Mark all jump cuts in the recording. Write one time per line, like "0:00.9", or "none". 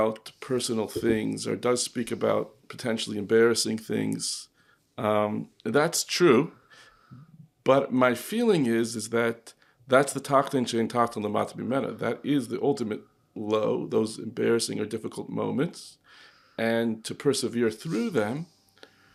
none